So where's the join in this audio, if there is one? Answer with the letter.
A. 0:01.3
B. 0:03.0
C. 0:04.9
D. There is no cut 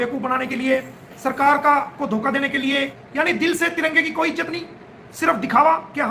B